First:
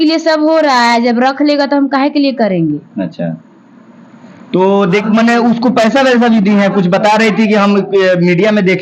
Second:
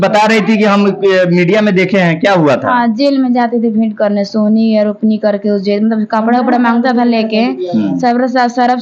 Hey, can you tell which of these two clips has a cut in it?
first; 1 cut; at 4.9 s

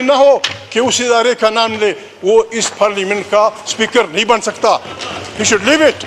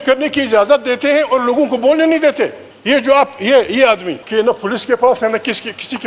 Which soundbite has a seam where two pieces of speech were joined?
second; 2 cuts; at 2.3 s, 4.2 s

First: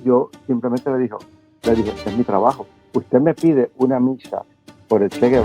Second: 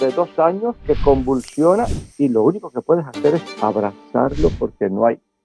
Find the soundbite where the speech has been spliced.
first; 1 cut; at 2.7 s

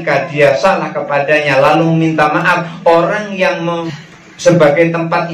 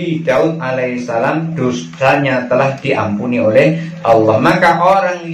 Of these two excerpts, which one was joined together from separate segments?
first; 1 cut; at 3.8 s

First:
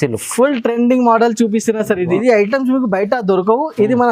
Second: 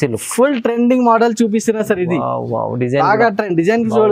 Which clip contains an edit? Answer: first; 1 cut; at 2.1 s

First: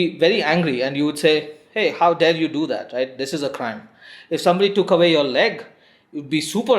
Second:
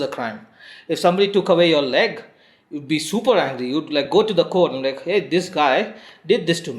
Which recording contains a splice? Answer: second; 1 cut; at 5.3 s

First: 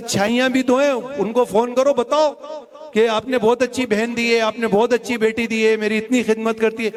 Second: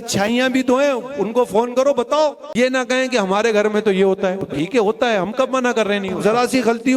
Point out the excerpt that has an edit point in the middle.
second; 3 cuts; at 2.4 s, 4.5 s, 6.2 s

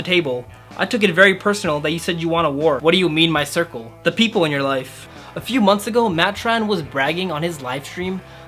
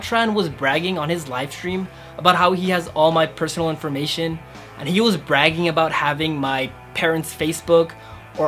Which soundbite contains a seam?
first; 2 cuts; at 2.8 s, 5.1 s

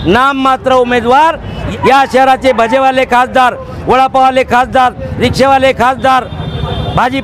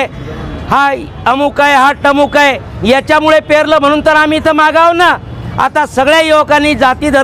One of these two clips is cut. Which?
first; 1 cut; at 1.6 s

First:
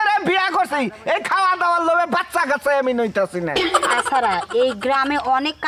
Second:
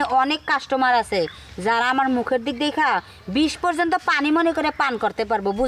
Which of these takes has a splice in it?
first; 1 cut; at 4.0 s

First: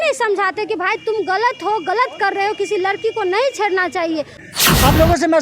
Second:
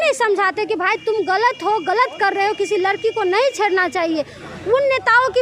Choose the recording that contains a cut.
first; 1 cut; at 4.5 s

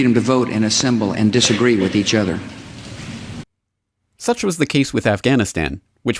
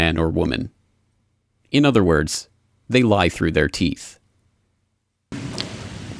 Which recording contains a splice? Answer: first; 1 cut; at 2.1 s

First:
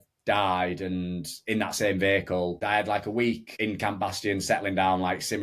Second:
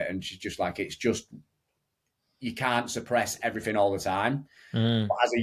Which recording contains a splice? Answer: first; 2 cuts; at 2.6 s, 3.5 s

